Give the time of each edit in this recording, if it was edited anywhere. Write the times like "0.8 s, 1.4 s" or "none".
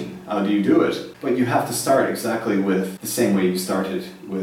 1.1 s, 3.0 s

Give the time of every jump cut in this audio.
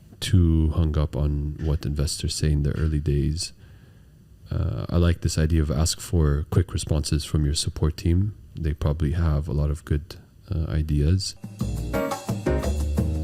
11.4 s

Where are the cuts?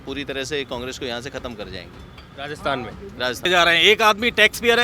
3.5 s

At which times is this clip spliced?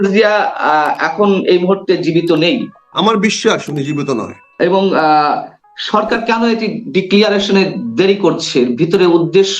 2.8 s, 4.4 s

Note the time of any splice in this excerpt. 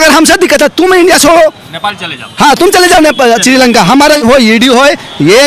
4.2 s

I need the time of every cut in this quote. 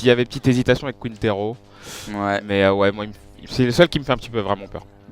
3.5 s

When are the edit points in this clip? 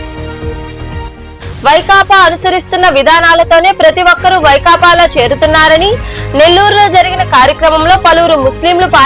1.1 s

